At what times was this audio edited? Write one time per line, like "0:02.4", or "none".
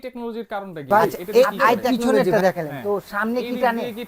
0:01.9